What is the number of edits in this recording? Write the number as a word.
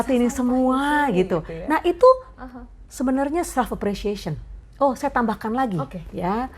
one